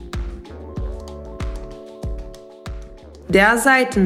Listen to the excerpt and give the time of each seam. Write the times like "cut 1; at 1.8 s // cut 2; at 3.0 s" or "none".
cut 1; at 3.1 s